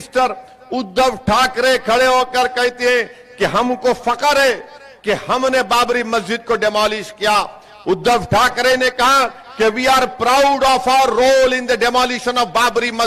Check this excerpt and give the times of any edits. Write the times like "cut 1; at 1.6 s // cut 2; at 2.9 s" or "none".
none